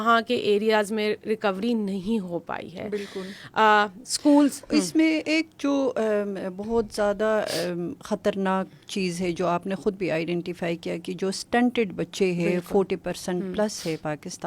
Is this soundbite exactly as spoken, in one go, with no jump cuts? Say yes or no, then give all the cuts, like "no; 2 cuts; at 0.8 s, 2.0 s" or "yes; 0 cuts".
yes; 0 cuts